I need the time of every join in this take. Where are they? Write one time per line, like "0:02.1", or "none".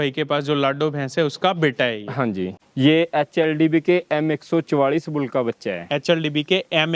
0:02.6

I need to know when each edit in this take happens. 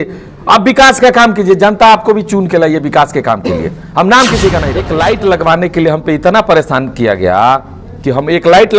0:04.8

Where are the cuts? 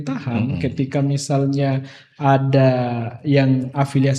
none

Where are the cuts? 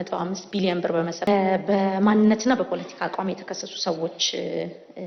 0:01.3

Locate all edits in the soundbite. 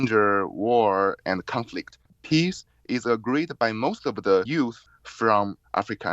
0:02.2
0:04.8

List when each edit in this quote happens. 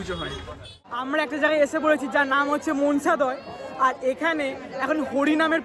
0:01.0

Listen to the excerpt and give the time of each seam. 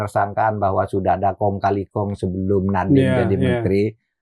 none

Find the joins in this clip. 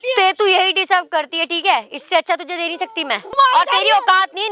0:03.4

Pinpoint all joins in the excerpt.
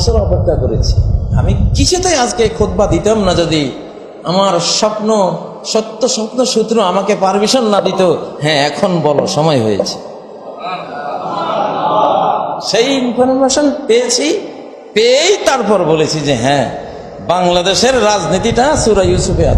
none

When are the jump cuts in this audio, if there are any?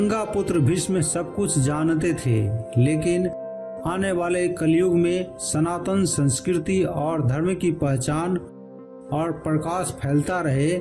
none

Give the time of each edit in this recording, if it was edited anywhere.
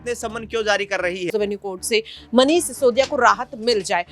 0:01.3

